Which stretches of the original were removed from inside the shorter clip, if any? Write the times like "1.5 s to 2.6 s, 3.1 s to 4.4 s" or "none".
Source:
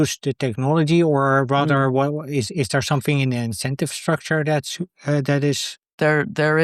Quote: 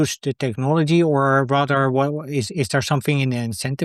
none